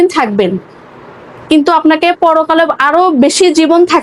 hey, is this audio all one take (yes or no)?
yes